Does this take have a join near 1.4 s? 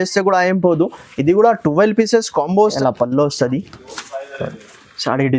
no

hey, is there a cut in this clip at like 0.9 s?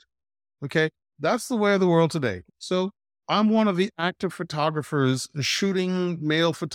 no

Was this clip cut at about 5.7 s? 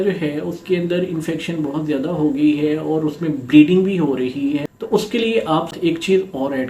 yes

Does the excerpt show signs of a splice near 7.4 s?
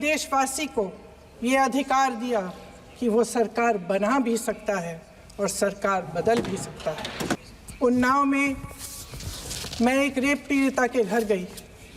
yes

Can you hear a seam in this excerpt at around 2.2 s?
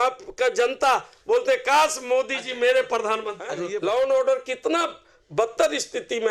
no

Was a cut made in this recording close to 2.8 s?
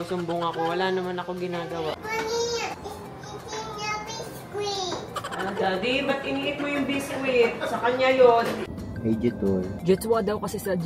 yes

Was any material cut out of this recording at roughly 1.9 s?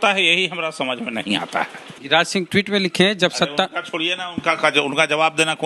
yes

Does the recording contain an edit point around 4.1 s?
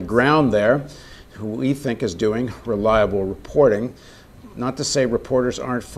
no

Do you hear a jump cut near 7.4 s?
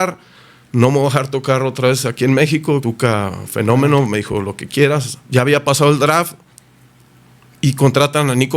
no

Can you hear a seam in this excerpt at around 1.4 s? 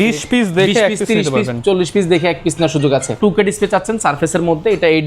no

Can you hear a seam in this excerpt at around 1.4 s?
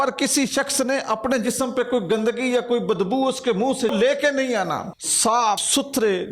no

